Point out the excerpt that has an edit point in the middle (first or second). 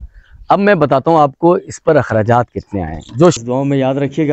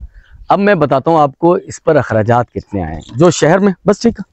first